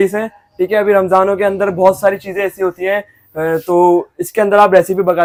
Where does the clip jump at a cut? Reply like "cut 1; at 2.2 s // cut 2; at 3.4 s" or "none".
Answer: none